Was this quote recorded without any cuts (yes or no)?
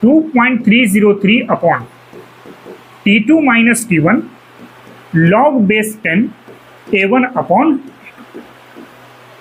yes